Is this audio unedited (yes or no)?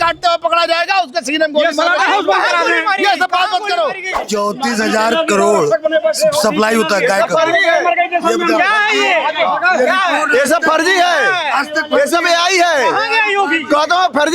no